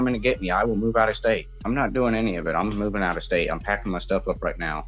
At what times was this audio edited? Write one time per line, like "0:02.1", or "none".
0:01.5